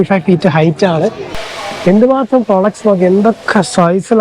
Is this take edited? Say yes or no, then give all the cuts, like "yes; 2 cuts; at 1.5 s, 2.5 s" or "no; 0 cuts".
yes; 1 cut; at 1.3 s